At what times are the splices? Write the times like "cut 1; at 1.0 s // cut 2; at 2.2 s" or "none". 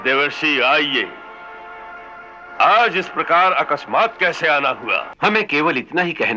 cut 1; at 5.1 s